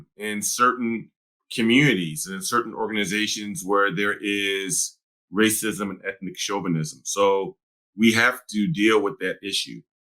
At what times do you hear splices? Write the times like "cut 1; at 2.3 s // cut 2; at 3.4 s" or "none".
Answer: none